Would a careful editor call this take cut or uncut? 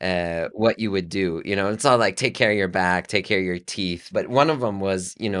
cut